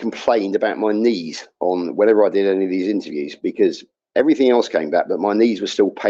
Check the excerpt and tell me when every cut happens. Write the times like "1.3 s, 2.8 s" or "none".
none